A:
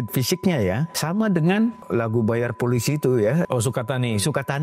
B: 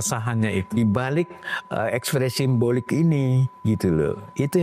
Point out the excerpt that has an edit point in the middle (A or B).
A